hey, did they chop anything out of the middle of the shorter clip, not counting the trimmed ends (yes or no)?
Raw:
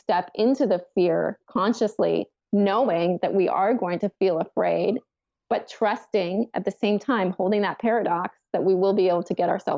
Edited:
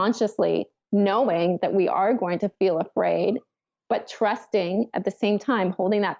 no